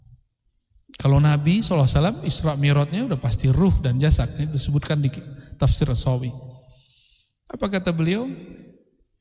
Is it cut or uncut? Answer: uncut